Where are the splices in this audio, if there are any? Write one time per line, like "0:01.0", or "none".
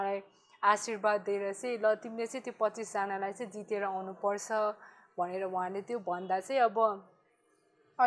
none